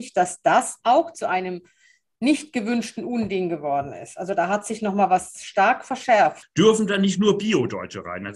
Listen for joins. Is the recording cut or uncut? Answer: cut